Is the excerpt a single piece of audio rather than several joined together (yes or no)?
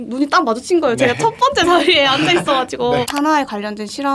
no